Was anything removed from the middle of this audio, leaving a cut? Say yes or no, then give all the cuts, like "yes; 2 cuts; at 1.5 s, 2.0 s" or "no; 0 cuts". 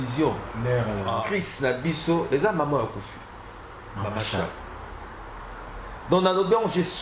yes; 1 cut; at 1.2 s